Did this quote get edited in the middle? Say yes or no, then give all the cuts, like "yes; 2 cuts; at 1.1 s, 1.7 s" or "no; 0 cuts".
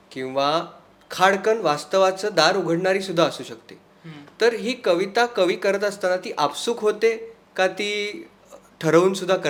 no; 0 cuts